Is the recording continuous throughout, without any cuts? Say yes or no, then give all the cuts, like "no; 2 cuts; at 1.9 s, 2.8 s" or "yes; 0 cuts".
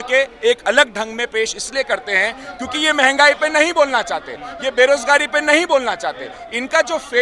yes; 0 cuts